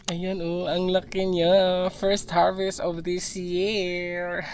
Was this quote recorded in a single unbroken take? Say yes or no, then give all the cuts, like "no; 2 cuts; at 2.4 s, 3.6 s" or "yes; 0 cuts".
yes; 0 cuts